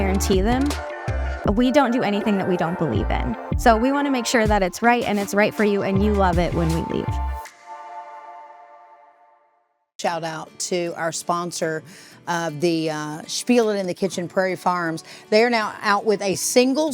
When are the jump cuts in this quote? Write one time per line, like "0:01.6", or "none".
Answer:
0:09.4